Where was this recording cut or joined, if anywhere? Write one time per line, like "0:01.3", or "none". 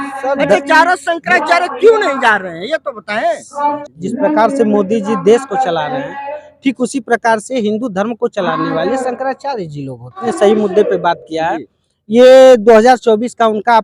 0:03.8
0:10.2

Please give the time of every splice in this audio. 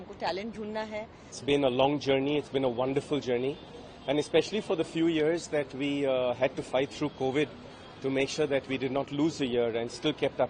0:01.4

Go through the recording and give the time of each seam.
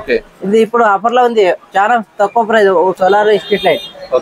0:02.9

